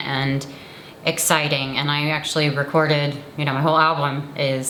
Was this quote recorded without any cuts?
yes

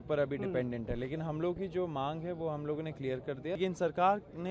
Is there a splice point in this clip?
yes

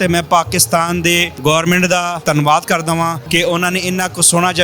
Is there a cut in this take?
yes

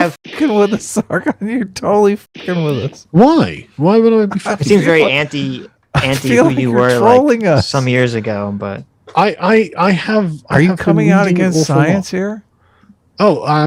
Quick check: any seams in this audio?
no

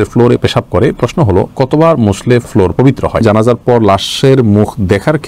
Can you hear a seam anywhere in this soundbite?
yes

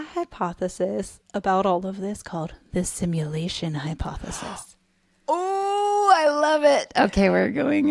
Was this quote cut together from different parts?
no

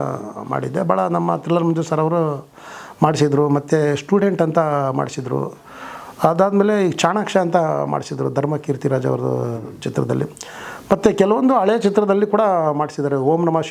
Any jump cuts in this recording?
no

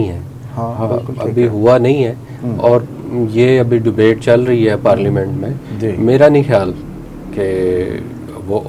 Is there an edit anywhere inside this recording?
no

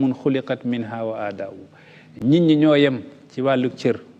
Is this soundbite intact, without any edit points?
yes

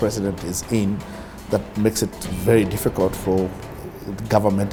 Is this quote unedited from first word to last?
yes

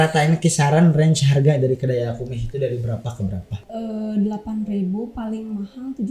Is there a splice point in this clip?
yes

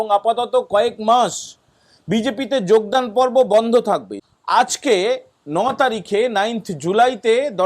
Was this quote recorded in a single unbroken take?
no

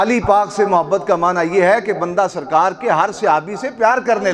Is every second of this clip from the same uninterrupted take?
yes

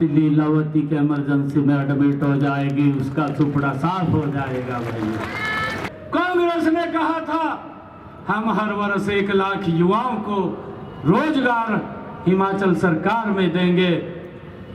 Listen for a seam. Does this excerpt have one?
no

